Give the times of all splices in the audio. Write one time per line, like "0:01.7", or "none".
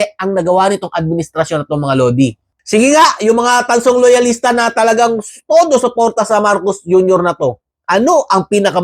0:02.5